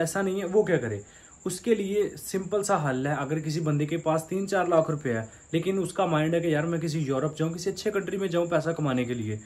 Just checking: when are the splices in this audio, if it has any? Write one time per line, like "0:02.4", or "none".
none